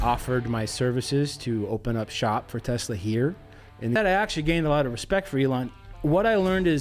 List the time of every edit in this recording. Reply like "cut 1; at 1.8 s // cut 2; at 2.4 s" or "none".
cut 1; at 4.0 s